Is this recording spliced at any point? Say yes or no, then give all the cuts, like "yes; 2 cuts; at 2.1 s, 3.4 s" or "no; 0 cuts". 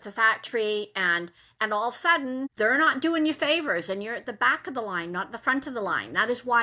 yes; 1 cut; at 2.5 s